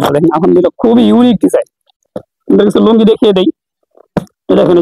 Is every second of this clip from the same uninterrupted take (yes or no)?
no